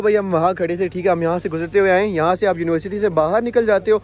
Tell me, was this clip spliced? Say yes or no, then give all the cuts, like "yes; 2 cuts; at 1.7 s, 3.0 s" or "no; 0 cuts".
no; 0 cuts